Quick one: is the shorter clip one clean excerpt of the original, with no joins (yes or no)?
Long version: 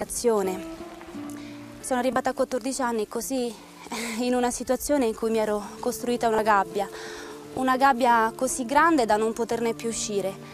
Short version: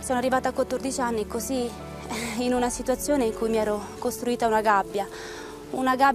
yes